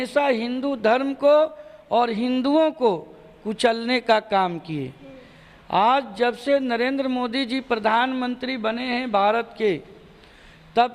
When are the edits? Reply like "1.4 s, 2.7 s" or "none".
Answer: none